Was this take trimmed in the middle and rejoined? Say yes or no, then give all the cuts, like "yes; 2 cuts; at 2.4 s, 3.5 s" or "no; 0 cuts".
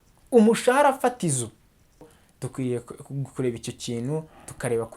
yes; 1 cut; at 2.1 s